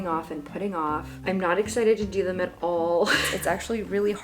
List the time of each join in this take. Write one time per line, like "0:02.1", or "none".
0:03.3